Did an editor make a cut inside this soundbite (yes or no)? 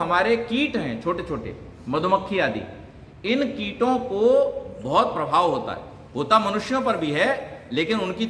no